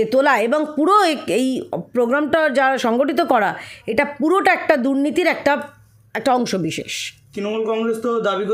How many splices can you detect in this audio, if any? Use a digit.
0